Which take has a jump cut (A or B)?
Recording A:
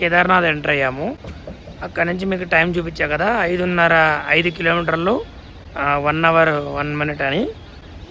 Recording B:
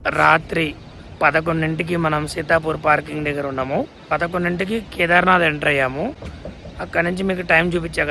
B